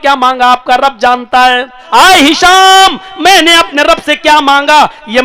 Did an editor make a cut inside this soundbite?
yes; 1 cut; at 1.8 s

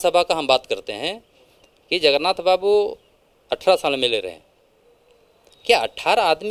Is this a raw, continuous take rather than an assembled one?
yes; 0 cuts

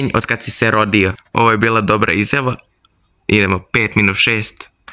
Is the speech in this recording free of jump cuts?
no; 1 cut; at 1.2 s

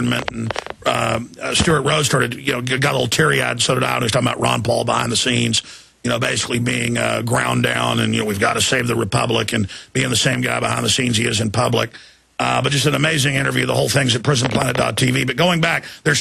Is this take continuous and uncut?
yes; 0 cuts

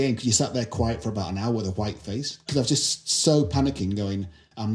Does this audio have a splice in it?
yes; 1 cut; at 2.4 s

